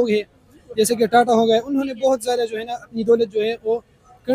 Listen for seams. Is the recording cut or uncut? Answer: uncut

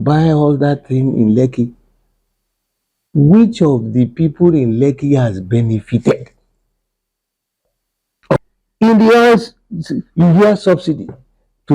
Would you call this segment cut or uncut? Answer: cut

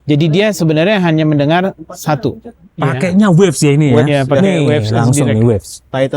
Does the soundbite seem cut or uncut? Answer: cut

